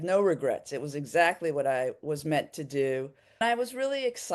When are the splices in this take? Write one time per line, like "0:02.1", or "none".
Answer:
0:03.4